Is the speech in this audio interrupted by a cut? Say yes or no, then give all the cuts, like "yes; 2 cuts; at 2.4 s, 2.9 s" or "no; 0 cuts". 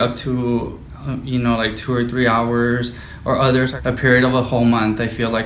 yes; 1 cut; at 3.7 s